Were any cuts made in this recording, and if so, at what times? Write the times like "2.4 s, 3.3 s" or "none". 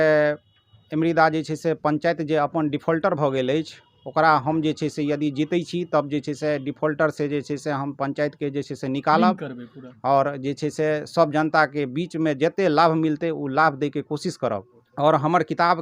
14.8 s